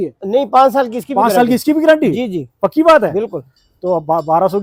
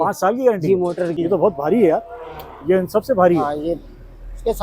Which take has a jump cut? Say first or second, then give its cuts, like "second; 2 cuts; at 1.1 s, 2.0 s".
second; 1 cut; at 1.1 s